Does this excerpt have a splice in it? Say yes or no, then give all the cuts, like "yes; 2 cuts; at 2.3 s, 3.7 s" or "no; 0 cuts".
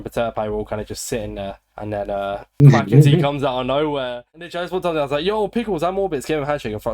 yes; 1 cut; at 4.2 s